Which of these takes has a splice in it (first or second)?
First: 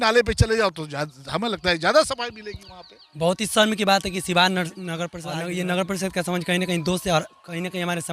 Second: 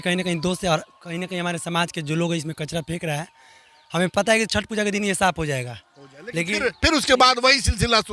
first